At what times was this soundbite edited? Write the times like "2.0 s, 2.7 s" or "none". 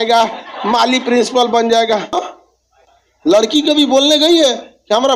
2.2 s